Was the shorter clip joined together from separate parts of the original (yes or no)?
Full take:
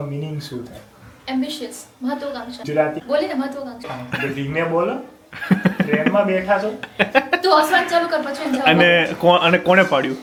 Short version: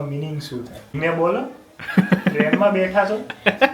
yes